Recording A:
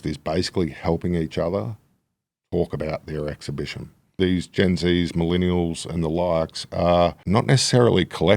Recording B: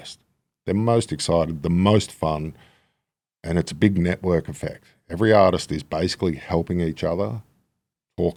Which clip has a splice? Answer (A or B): A